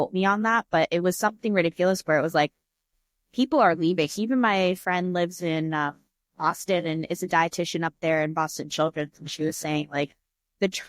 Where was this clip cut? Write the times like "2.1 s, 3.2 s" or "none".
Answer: 4.1 s